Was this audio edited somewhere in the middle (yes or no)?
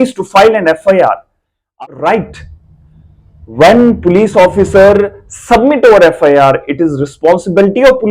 yes